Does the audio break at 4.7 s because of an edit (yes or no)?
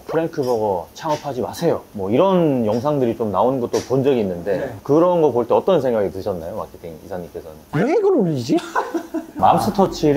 yes